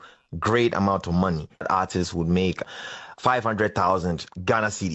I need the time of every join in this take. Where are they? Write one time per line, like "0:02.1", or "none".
0:01.6